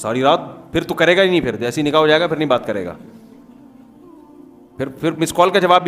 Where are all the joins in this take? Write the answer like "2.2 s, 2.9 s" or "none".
3.0 s, 4.5 s